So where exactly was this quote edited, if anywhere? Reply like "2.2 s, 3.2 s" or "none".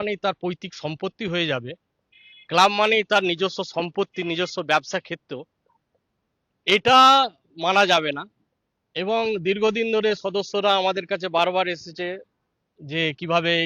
none